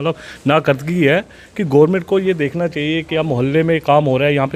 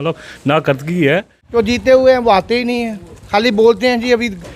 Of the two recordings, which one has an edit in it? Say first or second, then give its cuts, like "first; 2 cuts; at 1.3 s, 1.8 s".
second; 1 cut; at 1.4 s